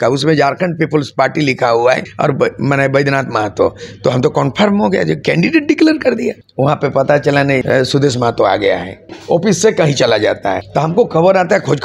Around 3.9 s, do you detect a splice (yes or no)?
no